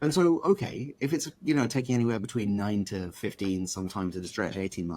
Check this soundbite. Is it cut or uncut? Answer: uncut